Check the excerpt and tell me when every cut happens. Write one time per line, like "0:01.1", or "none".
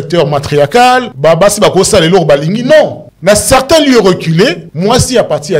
0:01.1
0:03.1
0:04.7